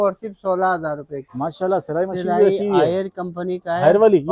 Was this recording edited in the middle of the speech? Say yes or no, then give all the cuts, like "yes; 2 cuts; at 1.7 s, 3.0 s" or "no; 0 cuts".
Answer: yes; 1 cut; at 1.2 s